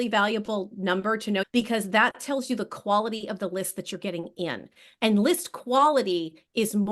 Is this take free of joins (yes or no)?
no